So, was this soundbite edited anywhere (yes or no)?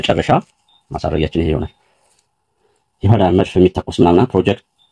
no